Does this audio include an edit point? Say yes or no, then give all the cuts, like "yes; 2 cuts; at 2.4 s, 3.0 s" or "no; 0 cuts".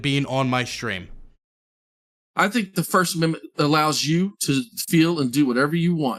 no; 0 cuts